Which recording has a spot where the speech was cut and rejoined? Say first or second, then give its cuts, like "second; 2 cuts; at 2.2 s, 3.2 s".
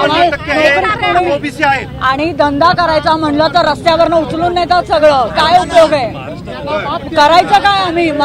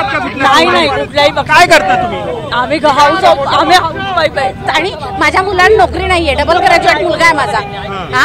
second; 1 cut; at 4.6 s